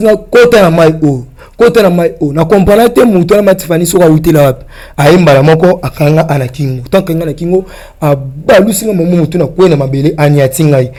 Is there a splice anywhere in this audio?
no; 0 cuts

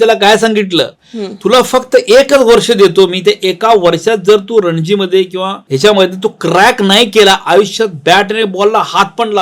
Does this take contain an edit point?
no; 0 cuts

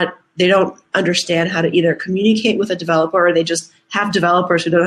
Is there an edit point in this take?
no; 0 cuts

